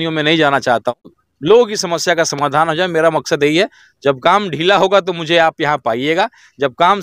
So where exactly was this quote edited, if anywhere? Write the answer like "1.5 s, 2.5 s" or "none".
1.2 s